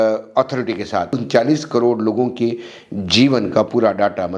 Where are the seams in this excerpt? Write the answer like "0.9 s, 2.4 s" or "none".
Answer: 1.2 s